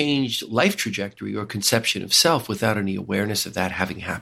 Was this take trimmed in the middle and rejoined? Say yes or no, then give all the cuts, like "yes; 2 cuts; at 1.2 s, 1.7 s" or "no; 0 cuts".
no; 0 cuts